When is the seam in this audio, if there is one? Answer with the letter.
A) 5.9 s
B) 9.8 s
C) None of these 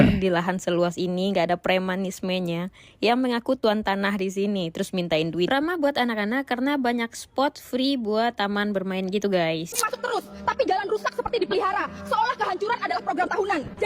B